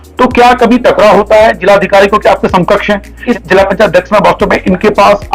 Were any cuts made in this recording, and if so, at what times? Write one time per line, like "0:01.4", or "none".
0:03.2